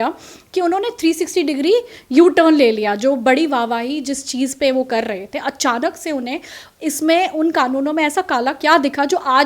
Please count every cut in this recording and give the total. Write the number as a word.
zero